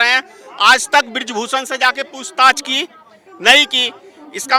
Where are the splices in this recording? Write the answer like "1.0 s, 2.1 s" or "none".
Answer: none